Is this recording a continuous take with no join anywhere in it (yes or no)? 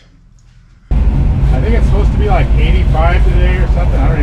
no